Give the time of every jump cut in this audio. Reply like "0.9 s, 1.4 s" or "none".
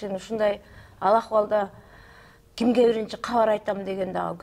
none